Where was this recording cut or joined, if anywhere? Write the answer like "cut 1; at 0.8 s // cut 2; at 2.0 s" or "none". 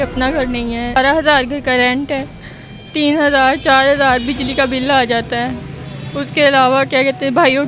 cut 1; at 1.0 s

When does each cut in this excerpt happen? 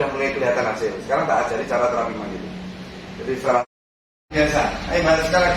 cut 1; at 4.3 s

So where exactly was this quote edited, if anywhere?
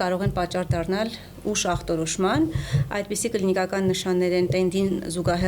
none

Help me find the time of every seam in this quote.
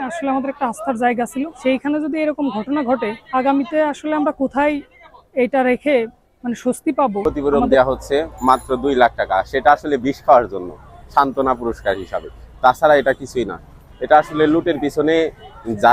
cut 1; at 1.5 s // cut 2; at 3.2 s // cut 3; at 7.2 s

